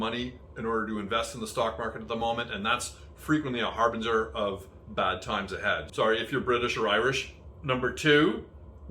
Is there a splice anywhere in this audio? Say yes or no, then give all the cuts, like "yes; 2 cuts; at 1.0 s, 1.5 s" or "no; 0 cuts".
yes; 1 cut; at 5.8 s